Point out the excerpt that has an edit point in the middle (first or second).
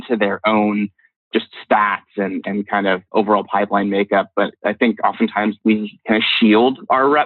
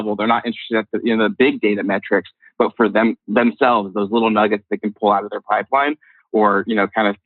first